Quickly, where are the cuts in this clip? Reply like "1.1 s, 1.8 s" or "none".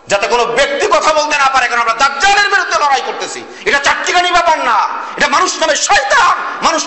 none